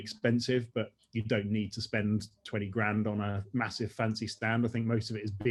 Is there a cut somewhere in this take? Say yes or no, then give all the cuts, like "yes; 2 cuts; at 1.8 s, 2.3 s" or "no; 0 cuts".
no; 0 cuts